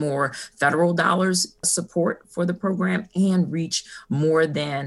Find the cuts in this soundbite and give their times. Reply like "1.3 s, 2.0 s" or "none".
1.7 s